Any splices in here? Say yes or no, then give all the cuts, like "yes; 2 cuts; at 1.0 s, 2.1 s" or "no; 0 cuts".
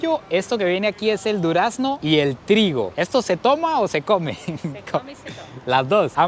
no; 0 cuts